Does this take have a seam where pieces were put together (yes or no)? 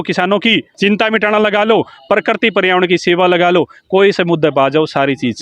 no